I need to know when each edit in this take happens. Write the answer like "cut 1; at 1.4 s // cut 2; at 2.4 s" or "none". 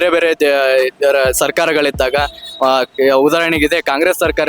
none